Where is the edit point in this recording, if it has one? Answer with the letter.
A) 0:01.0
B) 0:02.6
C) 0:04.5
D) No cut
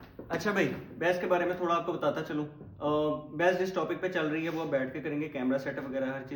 D